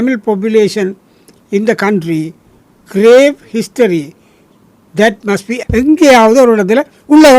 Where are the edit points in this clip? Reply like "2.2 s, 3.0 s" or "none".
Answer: 5.5 s